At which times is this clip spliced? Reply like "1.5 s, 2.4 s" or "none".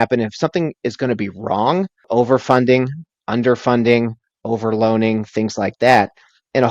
2.0 s